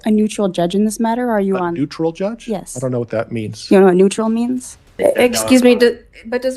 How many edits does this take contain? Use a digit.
1